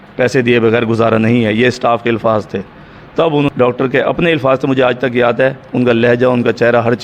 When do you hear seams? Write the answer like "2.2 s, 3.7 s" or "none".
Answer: 3.5 s